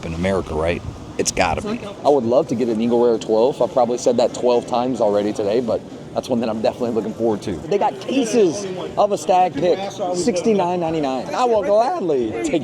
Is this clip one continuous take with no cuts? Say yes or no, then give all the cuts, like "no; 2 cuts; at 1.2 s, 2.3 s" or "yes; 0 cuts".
no; 3 cuts; at 1.9 s, 7.7 s, 11.3 s